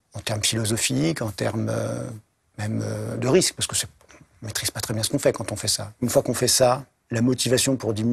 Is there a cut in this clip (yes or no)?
yes